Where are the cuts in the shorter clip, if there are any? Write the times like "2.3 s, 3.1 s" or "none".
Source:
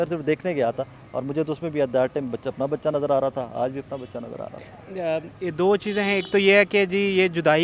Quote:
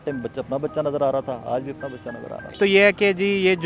2.5 s